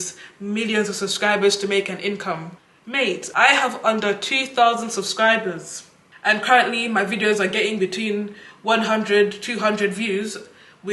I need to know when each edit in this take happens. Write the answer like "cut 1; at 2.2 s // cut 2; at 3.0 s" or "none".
none